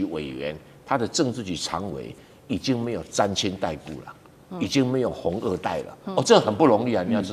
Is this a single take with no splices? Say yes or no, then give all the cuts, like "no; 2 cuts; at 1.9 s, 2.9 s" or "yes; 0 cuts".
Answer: yes; 0 cuts